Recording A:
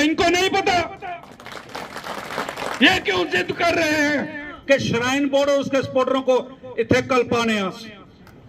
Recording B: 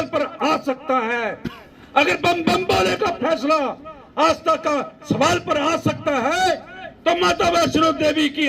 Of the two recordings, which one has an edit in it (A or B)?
A